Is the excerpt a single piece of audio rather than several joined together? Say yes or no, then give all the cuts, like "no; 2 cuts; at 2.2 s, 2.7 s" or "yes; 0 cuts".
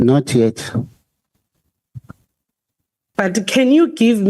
no; 1 cut; at 3.0 s